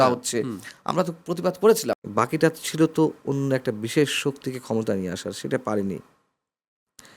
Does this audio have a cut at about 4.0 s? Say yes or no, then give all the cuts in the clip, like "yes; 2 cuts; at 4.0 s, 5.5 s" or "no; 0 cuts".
no; 1 cut; at 2.0 s